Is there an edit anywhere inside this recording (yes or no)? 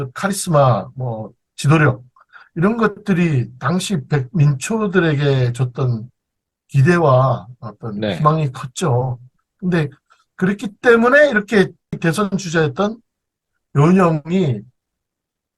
yes